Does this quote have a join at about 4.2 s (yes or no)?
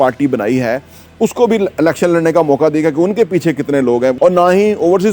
yes